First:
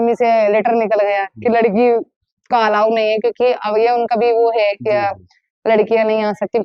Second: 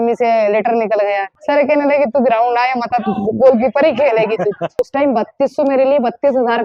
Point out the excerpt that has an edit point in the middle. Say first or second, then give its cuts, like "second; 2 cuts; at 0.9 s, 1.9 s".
second; 2 cuts; at 1.3 s, 4.9 s